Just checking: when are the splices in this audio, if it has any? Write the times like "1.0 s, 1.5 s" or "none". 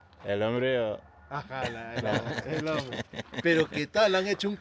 2.3 s